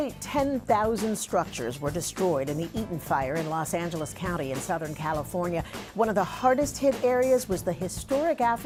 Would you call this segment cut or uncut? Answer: uncut